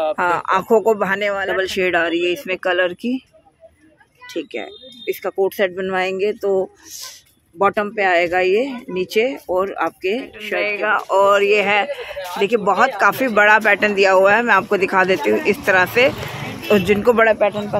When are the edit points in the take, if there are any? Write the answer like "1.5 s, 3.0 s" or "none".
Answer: 1.4 s, 10.6 s